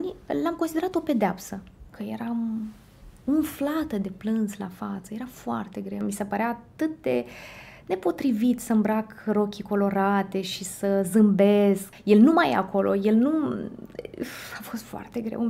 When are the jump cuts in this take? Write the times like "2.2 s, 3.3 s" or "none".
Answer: 1.9 s, 6.0 s, 11.9 s